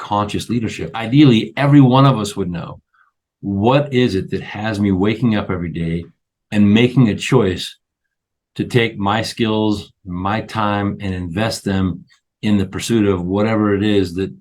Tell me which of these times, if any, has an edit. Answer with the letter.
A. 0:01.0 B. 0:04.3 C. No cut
A